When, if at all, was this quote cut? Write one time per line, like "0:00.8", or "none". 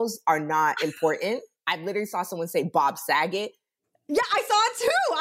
none